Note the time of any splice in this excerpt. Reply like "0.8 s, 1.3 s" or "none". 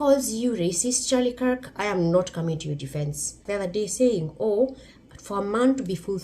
3.4 s